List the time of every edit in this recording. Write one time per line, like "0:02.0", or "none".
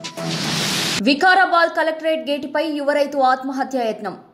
0:01.0